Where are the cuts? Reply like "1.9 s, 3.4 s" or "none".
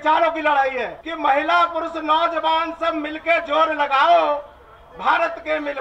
1.1 s